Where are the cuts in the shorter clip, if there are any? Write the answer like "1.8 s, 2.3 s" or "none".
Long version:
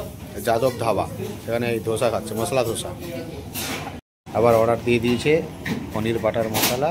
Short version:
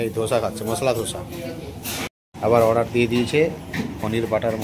2.1 s

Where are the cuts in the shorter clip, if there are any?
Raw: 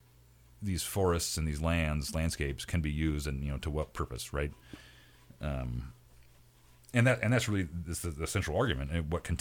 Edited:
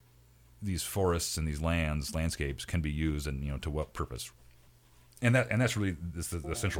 4.2 s

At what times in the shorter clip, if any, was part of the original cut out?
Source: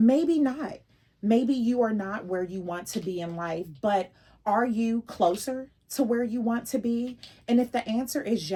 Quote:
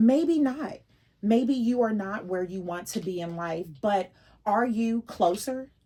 none

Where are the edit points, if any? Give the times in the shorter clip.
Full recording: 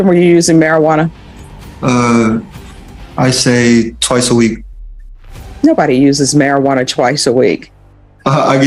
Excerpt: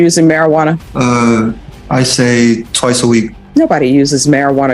0.9 s, 1.7 s, 3.4 s

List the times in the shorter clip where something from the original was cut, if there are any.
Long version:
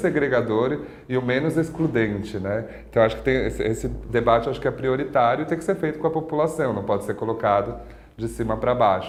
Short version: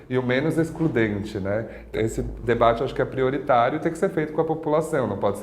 1.9 s

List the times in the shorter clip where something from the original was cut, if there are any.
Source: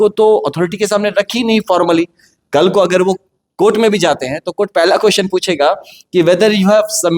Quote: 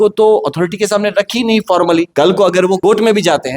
2.1 s, 2.8 s

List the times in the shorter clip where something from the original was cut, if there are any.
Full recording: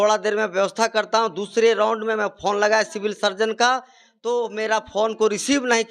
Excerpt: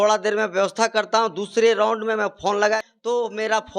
2.9 s

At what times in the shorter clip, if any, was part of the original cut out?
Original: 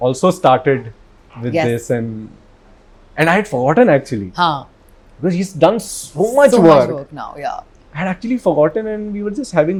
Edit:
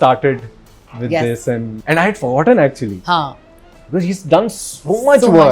1.8 s

